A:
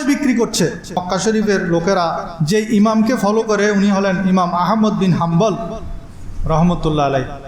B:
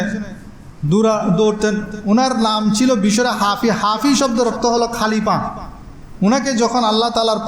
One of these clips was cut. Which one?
A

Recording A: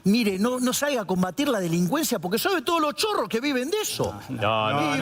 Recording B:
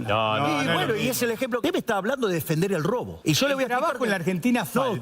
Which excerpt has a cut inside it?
B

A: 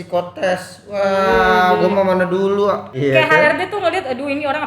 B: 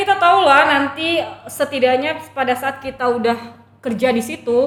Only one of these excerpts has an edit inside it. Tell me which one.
A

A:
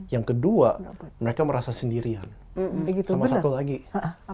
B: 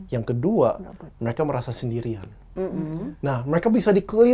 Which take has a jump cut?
A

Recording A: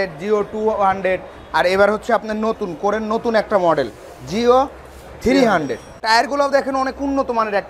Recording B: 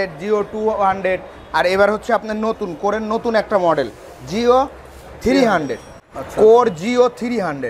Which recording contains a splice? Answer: A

